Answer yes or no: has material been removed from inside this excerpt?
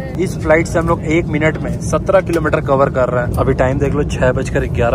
no